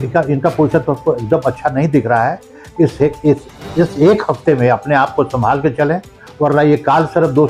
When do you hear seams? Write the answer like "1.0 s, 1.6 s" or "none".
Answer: none